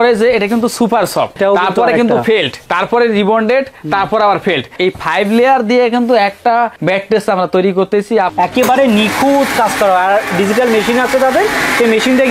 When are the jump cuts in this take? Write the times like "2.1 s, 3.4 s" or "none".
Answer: 1.4 s, 2.6 s, 4.7 s, 6.8 s, 8.3 s